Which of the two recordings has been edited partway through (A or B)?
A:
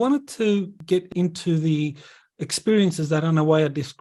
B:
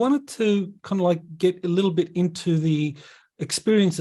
A